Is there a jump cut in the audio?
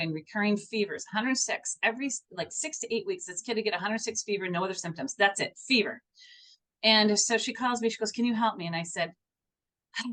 no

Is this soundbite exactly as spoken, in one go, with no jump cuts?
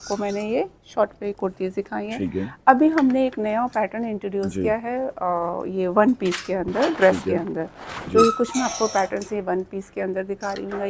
yes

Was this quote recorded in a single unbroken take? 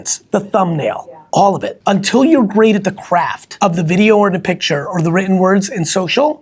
no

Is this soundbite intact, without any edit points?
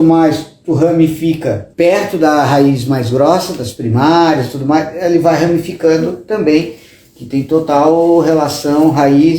no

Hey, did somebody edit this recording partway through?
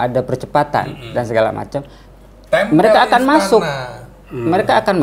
no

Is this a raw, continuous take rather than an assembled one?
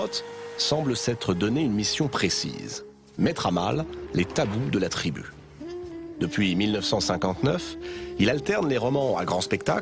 yes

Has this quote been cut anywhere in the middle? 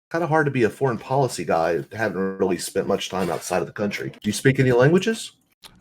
yes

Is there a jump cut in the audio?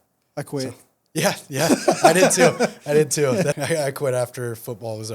yes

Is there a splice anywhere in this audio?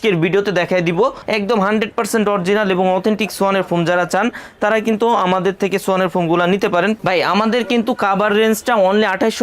yes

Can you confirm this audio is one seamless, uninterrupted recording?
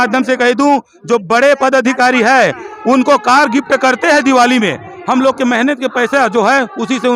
yes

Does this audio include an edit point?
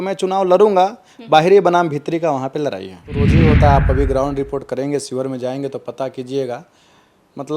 yes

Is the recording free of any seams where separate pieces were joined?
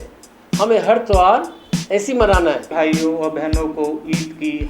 no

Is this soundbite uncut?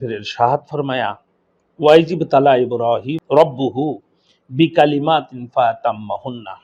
yes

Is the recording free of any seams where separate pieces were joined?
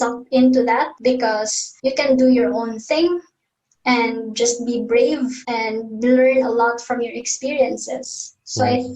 no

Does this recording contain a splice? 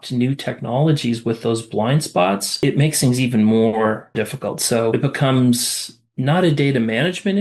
yes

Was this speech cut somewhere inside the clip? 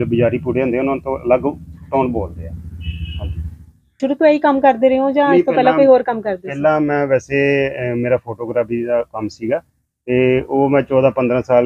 yes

